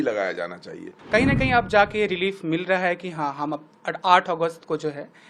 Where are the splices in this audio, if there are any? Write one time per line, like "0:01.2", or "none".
0:00.9